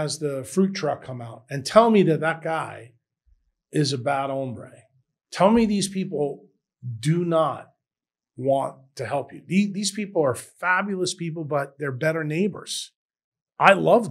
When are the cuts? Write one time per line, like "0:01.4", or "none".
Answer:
none